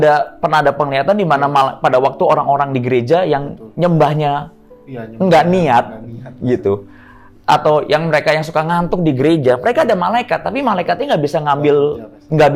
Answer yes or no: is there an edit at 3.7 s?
no